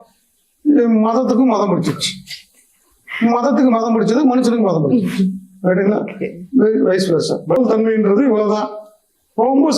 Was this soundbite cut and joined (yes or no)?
yes